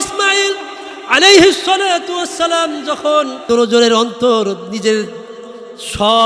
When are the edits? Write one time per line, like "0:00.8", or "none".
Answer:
0:03.4